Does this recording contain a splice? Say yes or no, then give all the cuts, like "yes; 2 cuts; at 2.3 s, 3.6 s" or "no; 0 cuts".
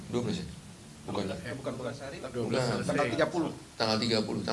no; 0 cuts